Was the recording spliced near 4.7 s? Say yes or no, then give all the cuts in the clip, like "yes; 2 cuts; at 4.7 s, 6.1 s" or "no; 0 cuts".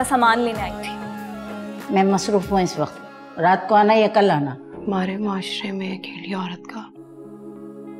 yes; 1 cut; at 4.7 s